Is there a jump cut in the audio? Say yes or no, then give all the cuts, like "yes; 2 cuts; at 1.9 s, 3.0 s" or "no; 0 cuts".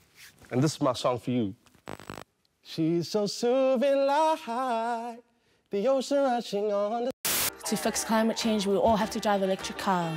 yes; 1 cut; at 7.2 s